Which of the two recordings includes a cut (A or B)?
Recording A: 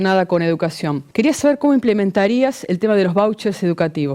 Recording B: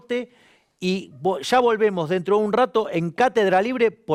A